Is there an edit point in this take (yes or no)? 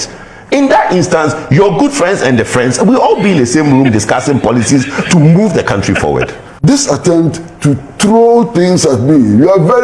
yes